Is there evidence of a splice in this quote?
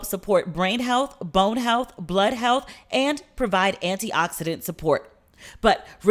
no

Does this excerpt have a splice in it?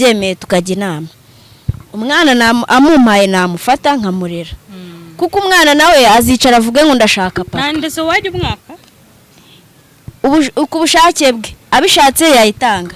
no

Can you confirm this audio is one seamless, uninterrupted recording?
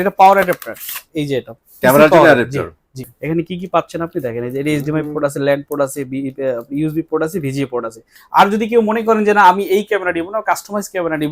no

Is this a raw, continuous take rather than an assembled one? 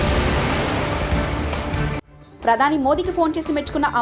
no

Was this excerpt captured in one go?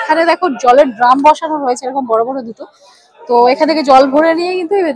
yes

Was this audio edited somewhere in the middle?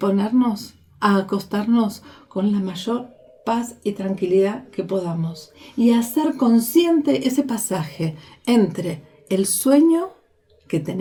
no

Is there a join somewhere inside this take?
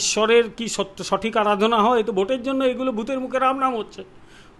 no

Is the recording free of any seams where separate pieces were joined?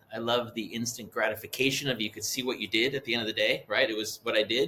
yes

